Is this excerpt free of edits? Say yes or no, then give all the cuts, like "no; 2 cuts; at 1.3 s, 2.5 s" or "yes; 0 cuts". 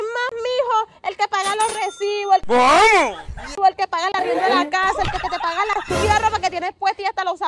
yes; 0 cuts